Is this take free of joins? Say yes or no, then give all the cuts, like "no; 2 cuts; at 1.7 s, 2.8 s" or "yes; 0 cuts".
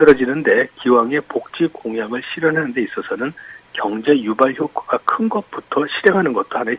no; 1 cut; at 4.8 s